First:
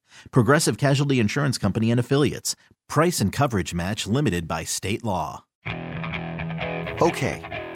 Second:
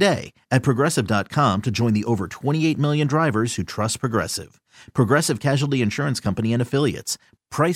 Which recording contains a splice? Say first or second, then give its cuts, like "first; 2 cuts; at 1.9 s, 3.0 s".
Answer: first; 1 cut; at 5.5 s